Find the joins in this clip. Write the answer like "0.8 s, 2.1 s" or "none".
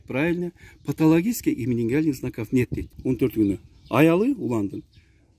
2.9 s

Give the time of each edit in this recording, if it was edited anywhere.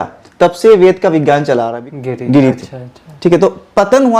1.8 s

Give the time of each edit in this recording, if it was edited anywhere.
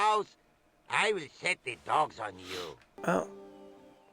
2.9 s

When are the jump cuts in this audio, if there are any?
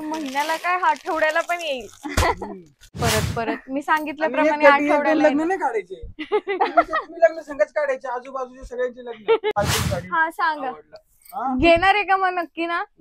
2.9 s, 9.5 s

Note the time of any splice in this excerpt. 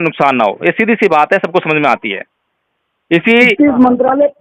none

